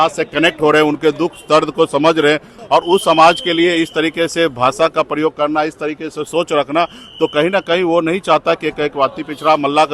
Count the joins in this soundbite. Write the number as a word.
one